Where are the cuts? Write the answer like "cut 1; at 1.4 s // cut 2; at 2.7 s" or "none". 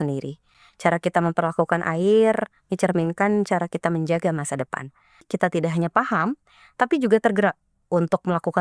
cut 1; at 5.3 s